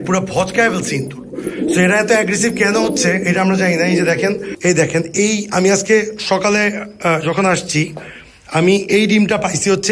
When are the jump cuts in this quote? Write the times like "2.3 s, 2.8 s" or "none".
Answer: 4.5 s